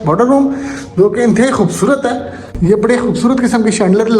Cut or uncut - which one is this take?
cut